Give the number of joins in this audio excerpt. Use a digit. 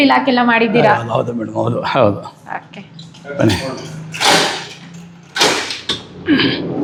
0